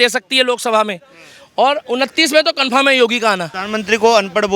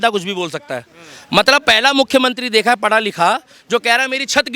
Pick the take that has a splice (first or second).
first